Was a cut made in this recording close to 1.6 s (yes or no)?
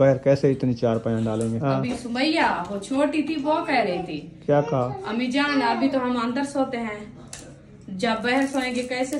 yes